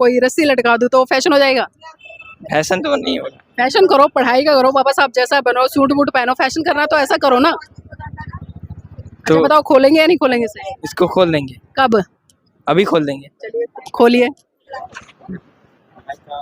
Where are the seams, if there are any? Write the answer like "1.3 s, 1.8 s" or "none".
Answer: 14.7 s